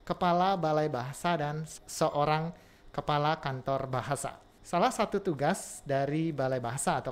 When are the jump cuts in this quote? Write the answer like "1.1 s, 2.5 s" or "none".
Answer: 1.7 s, 4.5 s